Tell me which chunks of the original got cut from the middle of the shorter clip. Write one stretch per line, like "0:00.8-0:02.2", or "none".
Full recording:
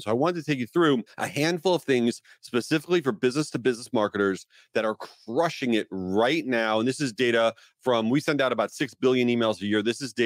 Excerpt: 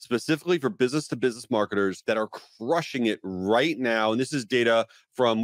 0:04.4-0:04.7